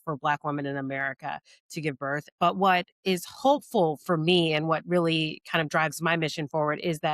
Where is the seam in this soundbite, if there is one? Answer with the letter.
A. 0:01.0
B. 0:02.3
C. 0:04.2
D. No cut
B